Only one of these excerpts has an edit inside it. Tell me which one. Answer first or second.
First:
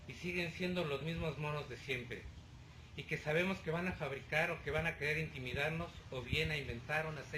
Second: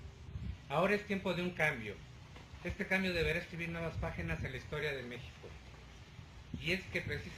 first